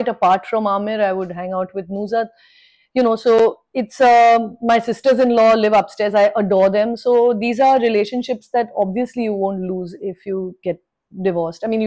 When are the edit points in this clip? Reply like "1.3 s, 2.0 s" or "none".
none